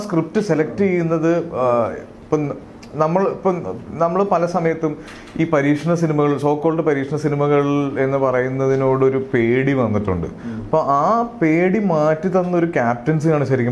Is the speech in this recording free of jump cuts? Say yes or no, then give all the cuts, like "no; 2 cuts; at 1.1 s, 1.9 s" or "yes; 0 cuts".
yes; 0 cuts